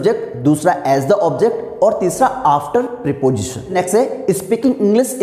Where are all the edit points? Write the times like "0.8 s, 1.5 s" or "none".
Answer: 3.7 s